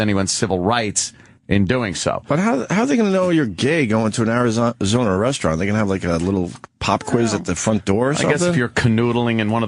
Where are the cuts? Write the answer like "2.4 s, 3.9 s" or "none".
6.0 s